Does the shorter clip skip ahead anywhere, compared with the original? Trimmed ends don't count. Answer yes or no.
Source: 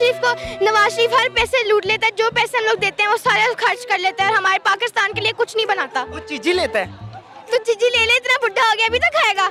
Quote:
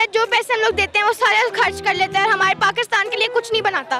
no